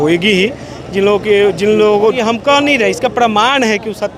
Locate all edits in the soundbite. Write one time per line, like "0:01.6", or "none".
0:02.2